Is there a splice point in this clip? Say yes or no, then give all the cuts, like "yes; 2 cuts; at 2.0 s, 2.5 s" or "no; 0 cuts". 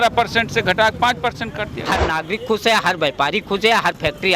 yes; 1 cut; at 1.7 s